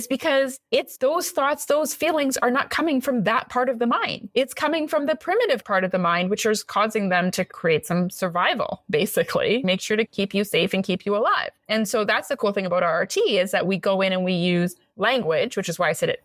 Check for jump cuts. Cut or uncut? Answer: uncut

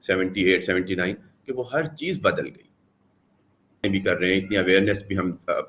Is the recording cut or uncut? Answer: cut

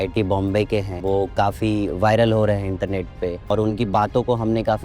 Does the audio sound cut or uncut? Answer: cut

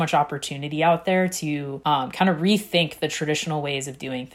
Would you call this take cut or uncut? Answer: cut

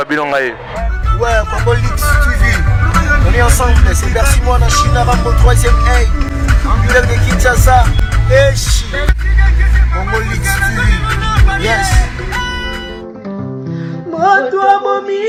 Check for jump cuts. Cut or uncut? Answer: uncut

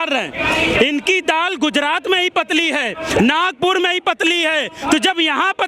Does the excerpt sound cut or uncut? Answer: uncut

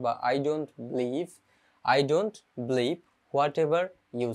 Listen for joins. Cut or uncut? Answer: uncut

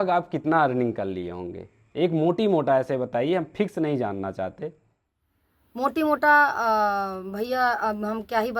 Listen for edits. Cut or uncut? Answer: uncut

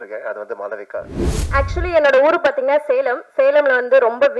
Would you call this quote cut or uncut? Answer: cut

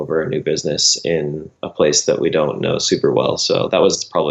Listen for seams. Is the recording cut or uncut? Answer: uncut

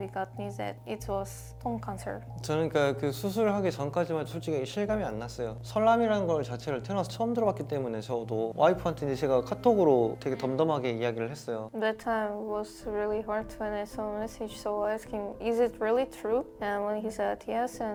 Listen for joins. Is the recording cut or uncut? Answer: uncut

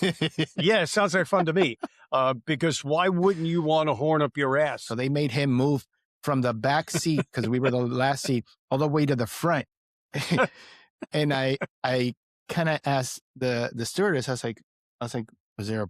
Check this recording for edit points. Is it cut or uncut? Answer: cut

